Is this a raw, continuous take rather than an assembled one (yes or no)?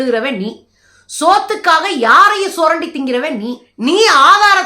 no